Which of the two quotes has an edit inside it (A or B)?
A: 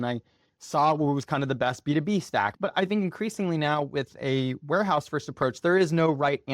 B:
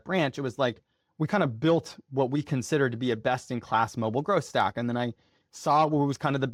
A